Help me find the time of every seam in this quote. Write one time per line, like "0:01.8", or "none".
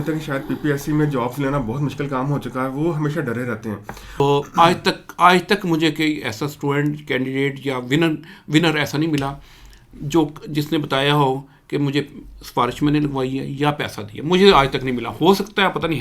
0:04.2